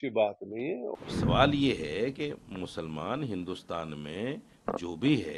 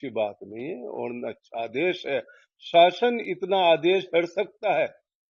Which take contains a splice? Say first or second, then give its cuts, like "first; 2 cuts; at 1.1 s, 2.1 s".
first; 1 cut; at 0.9 s